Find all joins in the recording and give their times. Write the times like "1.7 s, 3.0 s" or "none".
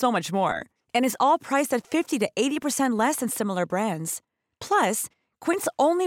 none